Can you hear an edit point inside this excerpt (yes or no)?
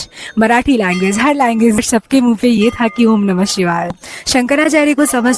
yes